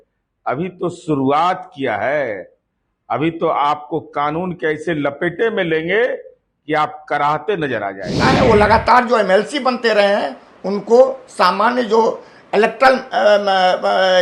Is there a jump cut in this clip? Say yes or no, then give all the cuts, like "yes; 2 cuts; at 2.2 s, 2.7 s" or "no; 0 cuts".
yes; 1 cut; at 8.2 s